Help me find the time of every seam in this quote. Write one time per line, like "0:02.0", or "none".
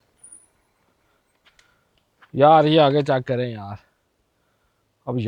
none